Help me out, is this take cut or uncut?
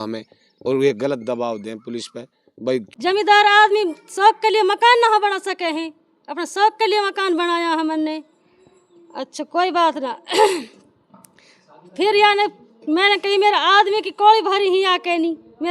cut